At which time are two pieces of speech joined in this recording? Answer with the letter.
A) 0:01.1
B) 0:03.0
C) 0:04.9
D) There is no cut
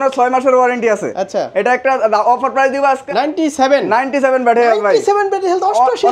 B